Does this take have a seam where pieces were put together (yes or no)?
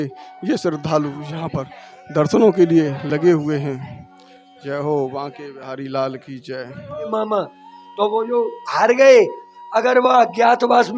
yes